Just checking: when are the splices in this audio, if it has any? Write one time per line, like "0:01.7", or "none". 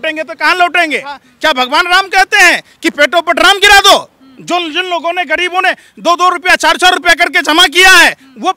0:01.3